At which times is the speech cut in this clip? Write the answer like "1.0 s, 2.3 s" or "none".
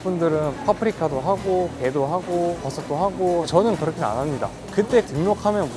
4.7 s